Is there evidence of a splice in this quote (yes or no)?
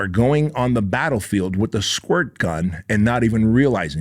no